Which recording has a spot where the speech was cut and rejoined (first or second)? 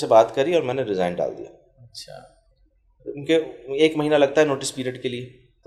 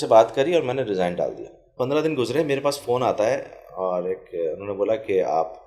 second